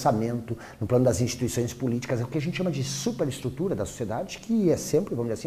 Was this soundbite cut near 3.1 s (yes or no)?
yes